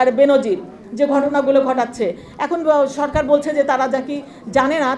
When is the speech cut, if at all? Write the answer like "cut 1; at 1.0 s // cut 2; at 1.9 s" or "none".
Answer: none